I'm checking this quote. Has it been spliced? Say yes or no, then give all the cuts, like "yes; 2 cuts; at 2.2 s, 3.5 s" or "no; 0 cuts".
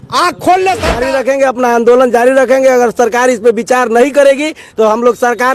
yes; 1 cut; at 1.0 s